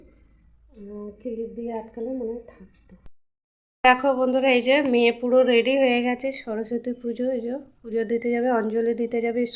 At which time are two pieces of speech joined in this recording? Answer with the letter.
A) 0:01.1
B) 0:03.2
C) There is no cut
B